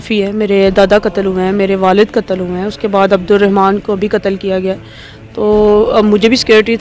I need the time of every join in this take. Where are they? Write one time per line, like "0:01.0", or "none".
none